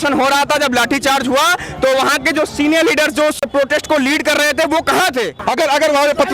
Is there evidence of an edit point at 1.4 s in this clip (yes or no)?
no